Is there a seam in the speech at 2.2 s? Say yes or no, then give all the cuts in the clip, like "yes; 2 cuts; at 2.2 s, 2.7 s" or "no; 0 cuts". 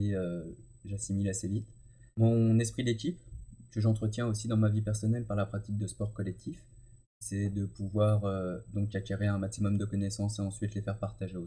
yes; 2 cuts; at 2.2 s, 7.3 s